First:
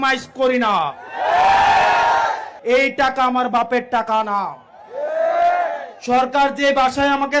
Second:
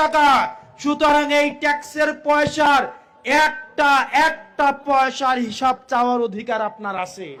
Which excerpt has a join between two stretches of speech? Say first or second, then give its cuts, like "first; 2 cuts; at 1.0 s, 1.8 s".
first; 1 cut; at 2.5 s